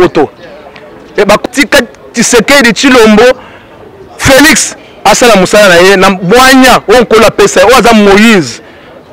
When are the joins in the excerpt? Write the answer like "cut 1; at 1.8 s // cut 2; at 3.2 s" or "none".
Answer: cut 1; at 1.4 s